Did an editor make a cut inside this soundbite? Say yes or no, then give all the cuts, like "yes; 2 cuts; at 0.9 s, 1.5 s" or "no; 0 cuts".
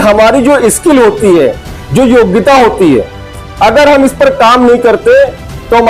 no; 0 cuts